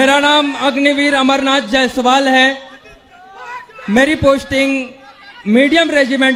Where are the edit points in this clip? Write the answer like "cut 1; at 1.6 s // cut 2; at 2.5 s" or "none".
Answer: none